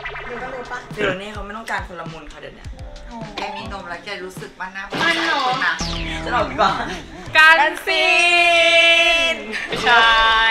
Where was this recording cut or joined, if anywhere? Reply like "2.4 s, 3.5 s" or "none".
7.3 s